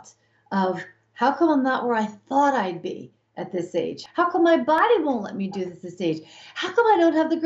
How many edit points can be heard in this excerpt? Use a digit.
1